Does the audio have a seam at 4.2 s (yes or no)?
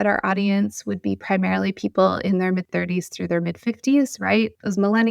no